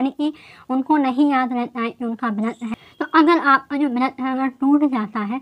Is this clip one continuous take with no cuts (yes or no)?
no